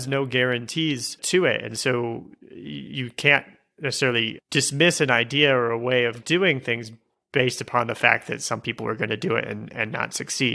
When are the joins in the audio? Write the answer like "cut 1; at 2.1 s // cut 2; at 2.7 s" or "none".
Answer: cut 1; at 6.2 s